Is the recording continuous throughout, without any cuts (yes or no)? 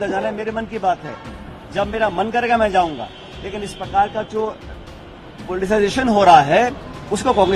yes